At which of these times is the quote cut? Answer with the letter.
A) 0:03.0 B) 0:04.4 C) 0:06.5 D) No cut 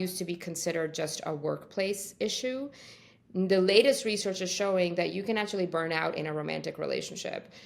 D